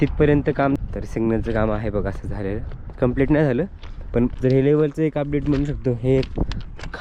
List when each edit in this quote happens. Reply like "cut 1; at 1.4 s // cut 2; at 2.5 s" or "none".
cut 1; at 0.8 s // cut 2; at 4.4 s